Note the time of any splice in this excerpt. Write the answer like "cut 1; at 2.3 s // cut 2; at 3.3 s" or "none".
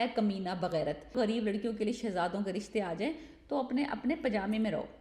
cut 1; at 1.1 s